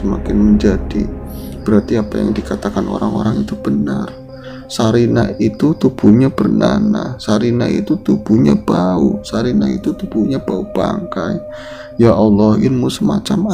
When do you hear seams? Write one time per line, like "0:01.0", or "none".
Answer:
none